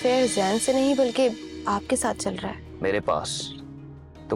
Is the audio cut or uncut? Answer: cut